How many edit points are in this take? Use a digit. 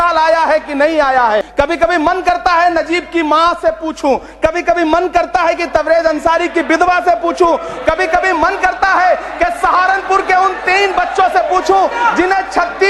1